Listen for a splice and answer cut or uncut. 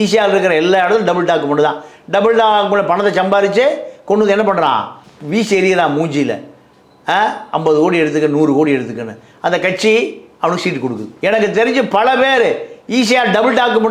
uncut